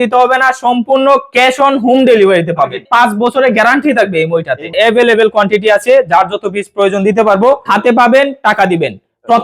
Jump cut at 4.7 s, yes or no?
yes